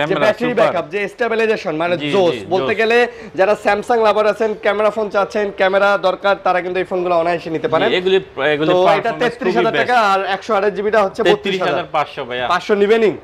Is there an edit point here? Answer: no; 0 cuts

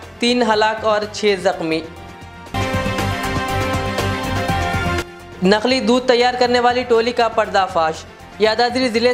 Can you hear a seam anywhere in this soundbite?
no; 0 cuts

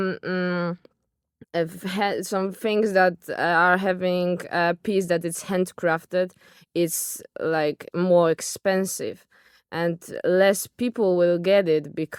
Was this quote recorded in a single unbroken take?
yes; 0 cuts

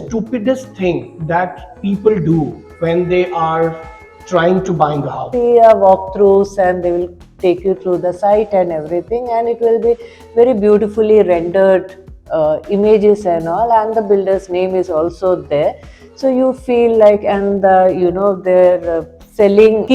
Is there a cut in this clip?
yes; 1 cut; at 5.2 s

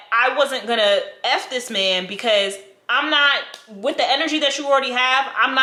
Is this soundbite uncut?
yes; 0 cuts

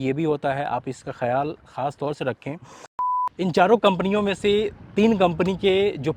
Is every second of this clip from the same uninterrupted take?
no; 1 cut; at 3.3 s

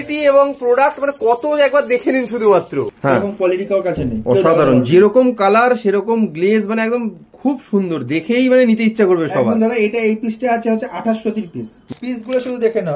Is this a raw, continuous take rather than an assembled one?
no; 2 cuts; at 2.9 s, 11.9 s

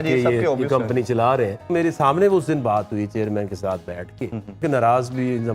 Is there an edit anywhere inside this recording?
yes; 2 cuts; at 1.7 s, 4.6 s

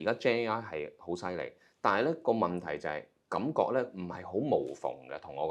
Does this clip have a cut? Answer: no; 0 cuts

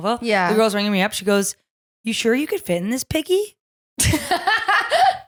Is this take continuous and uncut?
yes; 0 cuts

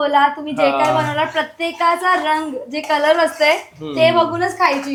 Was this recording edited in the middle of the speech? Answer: no; 0 cuts

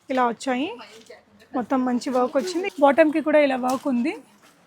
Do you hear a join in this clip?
yes; 1 cut; at 2.7 s

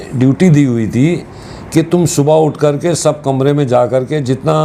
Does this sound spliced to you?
no; 0 cuts

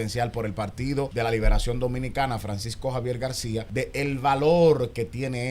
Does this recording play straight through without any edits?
no; 2 cuts; at 1.1 s, 3.7 s

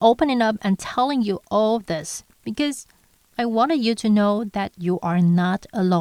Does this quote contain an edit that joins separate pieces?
no; 0 cuts

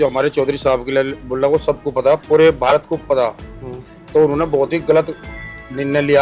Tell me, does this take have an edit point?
no; 0 cuts

